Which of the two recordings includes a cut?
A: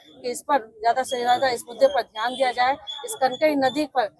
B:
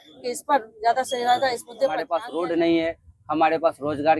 B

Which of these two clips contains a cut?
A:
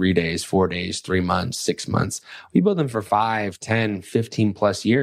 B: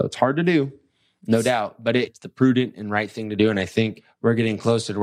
B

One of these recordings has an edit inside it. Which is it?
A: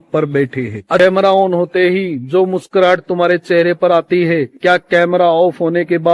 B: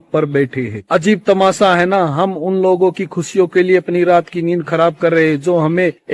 A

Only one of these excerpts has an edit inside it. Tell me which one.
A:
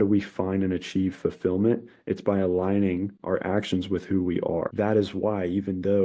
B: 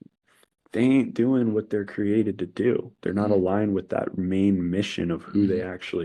A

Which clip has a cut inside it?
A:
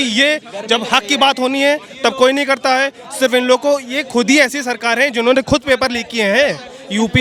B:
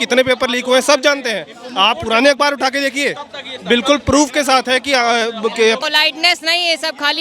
B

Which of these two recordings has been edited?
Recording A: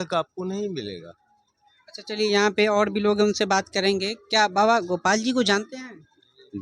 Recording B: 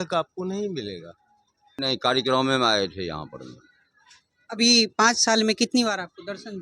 B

